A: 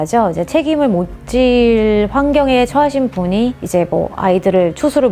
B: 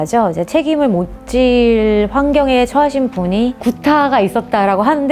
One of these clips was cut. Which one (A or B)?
B